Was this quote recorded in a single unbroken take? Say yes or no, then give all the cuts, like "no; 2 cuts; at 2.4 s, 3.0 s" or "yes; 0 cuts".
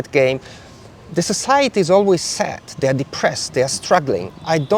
yes; 0 cuts